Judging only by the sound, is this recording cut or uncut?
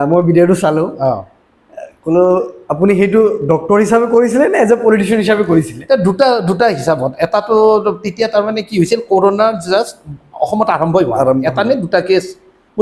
uncut